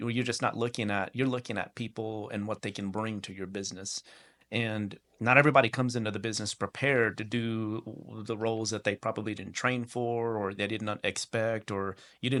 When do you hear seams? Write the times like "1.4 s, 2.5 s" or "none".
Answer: none